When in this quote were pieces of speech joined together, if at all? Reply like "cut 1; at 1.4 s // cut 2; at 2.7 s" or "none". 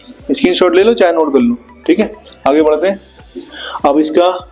none